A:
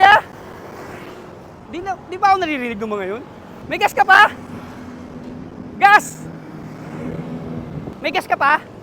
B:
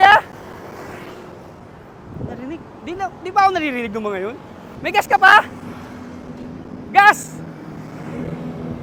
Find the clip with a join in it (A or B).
A